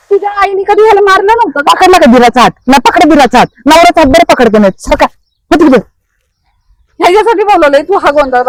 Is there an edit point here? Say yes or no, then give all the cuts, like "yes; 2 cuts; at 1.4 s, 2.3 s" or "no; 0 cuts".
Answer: no; 0 cuts